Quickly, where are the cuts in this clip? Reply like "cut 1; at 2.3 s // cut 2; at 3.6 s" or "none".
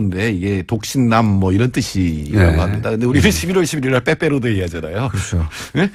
none